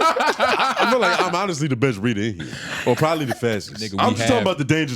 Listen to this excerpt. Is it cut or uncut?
cut